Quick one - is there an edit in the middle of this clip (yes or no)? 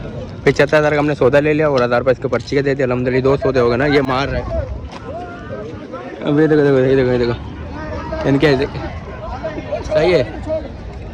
no